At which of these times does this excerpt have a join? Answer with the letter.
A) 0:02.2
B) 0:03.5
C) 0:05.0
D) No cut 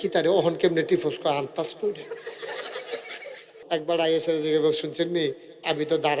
B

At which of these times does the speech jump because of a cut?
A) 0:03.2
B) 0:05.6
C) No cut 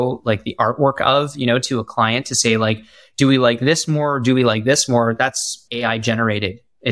B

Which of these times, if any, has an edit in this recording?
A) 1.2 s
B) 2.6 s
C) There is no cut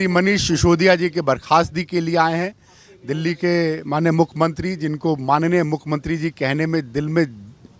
C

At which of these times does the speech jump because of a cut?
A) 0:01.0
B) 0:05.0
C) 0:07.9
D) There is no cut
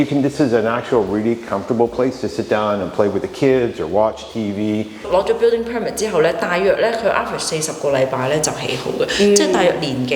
B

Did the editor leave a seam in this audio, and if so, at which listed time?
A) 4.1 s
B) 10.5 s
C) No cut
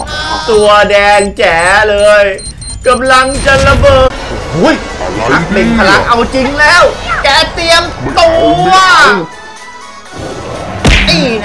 A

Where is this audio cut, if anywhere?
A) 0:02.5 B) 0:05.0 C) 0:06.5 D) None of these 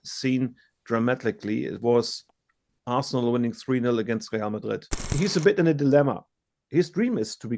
B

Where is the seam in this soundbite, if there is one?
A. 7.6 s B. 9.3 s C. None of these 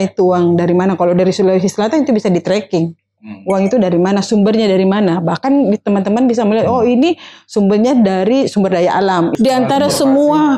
B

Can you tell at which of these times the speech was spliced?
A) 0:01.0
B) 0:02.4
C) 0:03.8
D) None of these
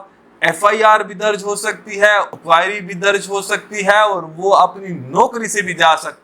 B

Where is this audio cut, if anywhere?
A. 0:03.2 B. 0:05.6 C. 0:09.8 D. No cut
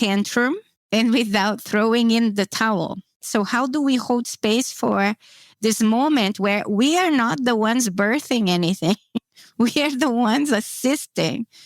A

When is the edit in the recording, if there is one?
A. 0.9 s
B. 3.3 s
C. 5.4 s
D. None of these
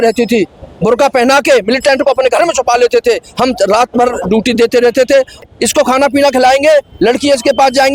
C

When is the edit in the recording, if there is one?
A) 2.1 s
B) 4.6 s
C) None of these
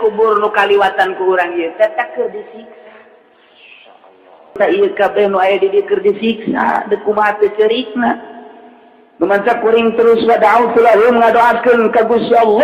B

